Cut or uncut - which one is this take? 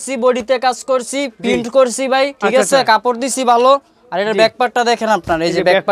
uncut